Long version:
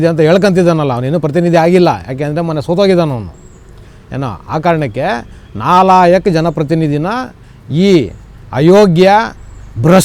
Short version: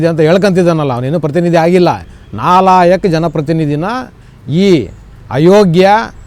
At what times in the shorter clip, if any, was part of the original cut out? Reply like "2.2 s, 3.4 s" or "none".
2.1 s